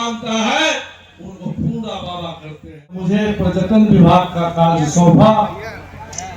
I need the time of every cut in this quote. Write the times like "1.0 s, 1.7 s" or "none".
3.1 s